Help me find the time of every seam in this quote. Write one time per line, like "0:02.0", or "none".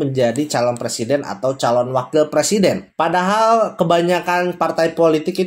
none